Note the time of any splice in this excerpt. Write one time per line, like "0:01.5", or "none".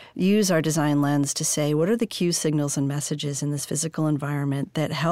none